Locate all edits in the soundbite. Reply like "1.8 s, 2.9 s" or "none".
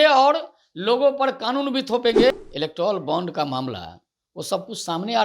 2.3 s